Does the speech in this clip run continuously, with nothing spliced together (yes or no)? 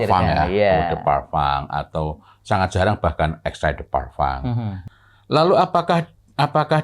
no